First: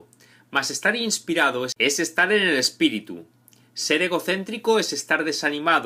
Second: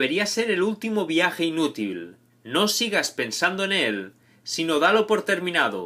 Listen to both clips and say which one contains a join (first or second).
second